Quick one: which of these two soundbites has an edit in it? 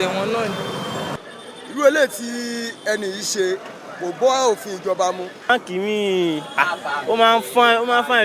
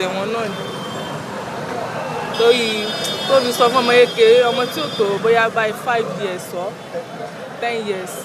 first; 2 cuts; at 1.2 s, 5.5 s

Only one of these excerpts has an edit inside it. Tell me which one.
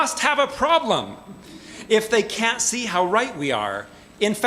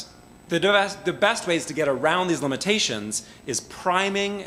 first; 1 cut; at 1.4 s

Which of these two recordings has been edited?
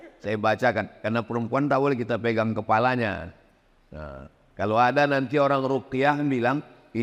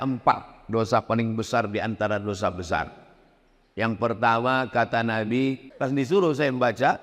second; 1 cut; at 5.7 s

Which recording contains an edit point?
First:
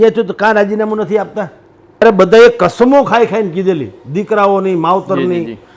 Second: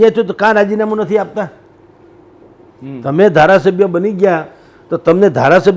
first; 1 cut; at 2.0 s

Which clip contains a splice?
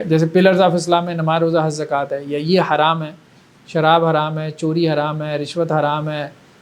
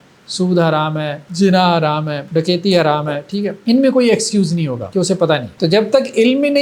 second; 5 cuts; at 1.2 s, 2.2 s, 3.6 s, 4.8 s, 5.5 s

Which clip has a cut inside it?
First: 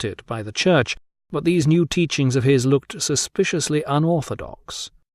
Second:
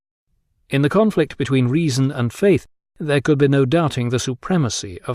first; 1 cut; at 1.4 s

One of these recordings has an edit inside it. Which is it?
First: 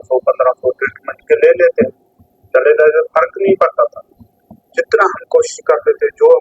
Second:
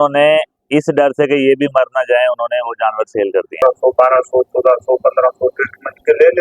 second; 1 cut; at 3.6 s

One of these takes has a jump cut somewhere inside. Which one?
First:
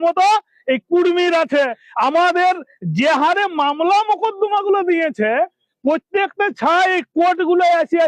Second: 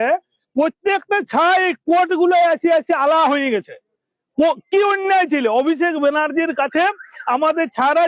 first; 1 cut; at 1.8 s

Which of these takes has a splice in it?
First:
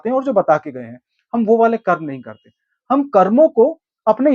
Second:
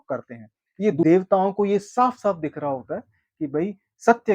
second; 1 cut; at 1.0 s

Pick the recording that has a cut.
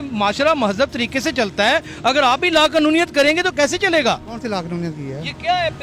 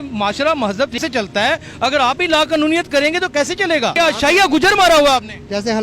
second; 2 cuts; at 0.9 s, 3.9 s

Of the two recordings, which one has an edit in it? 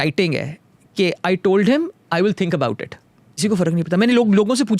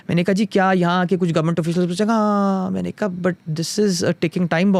first; 1 cut; at 3.4 s

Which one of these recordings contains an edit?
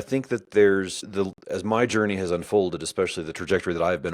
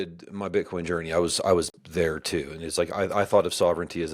first; 1 cut; at 1.0 s

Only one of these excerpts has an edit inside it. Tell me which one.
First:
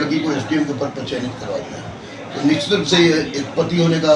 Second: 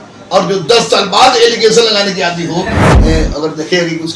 second; 1 cut; at 2.8 s

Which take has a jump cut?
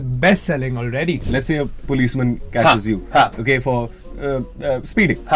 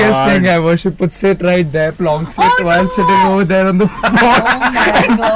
first; 1 cut; at 1.2 s

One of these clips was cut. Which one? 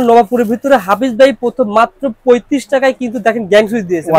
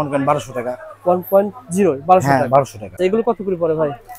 second; 1 cut; at 3.0 s

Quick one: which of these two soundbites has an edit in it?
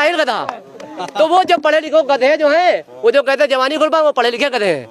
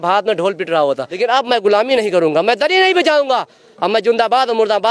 second; 1 cut; at 1.1 s

